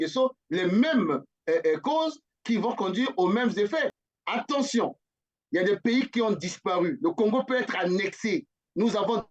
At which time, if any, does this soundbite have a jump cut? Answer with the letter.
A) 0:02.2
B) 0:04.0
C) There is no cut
B